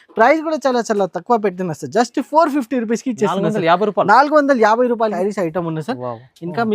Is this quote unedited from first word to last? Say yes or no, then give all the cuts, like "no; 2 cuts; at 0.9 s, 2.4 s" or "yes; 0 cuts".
no; 1 cut; at 5.2 s